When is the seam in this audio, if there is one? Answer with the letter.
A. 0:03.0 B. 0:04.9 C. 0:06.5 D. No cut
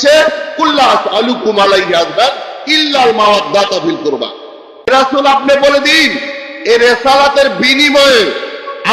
B